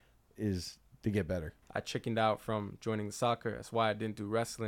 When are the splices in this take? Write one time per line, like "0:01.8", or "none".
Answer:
0:01.6